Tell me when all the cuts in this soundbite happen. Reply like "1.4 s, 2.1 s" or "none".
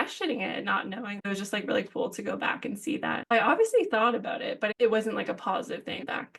1.3 s, 3.2 s, 4.8 s